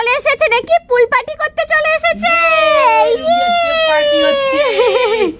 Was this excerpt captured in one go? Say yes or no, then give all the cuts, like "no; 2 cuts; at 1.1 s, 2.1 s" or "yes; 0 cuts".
yes; 0 cuts